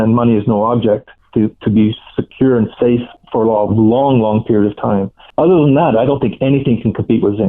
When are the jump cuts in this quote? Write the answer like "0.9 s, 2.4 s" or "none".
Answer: 1.2 s, 3.2 s, 5.2 s